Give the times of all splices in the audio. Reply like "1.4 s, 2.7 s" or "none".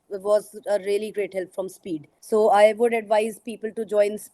2.1 s